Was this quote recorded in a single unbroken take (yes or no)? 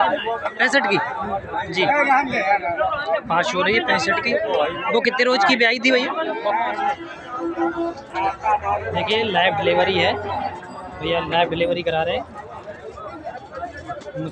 no